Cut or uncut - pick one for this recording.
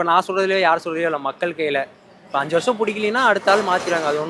uncut